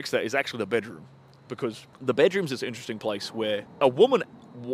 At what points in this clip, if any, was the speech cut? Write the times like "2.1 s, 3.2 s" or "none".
1.9 s, 3.7 s